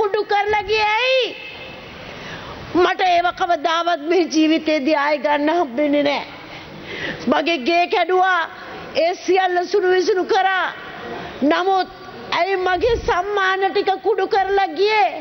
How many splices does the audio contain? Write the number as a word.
zero